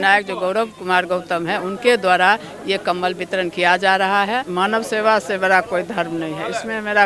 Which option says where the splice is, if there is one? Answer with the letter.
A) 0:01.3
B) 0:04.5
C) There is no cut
B